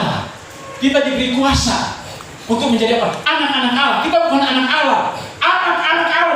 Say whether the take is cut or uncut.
uncut